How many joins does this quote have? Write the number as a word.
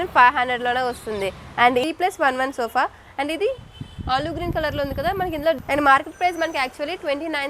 two